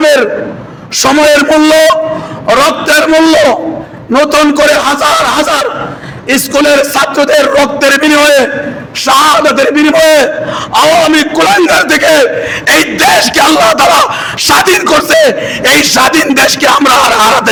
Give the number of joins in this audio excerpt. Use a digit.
0